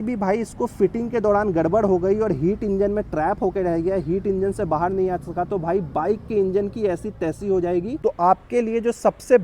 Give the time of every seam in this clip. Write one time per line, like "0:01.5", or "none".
0:08.0